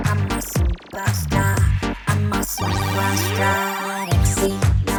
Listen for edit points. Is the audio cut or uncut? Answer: uncut